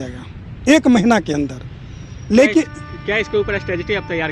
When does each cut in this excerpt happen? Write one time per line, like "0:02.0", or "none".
none